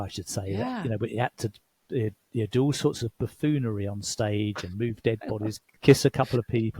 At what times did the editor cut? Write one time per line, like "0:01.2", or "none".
0:05.7